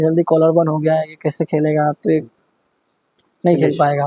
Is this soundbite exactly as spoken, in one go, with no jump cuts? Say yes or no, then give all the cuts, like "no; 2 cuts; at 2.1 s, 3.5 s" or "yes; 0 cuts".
yes; 0 cuts